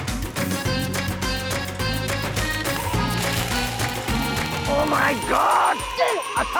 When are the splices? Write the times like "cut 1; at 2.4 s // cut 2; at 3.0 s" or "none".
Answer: none